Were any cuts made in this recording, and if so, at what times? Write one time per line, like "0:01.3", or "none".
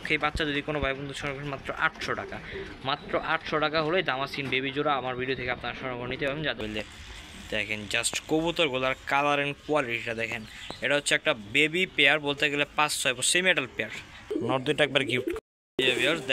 0:06.6
0:14.3